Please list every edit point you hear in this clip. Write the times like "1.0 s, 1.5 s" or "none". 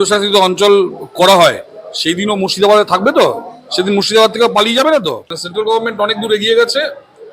5.2 s